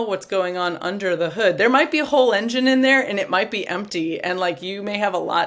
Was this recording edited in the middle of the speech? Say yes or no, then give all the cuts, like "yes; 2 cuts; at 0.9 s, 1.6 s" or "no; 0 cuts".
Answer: no; 0 cuts